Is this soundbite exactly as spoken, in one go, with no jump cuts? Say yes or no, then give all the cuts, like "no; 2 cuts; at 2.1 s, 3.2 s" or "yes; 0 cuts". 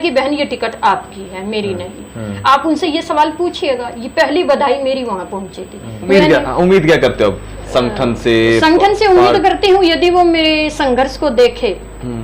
no; 1 cut; at 6.1 s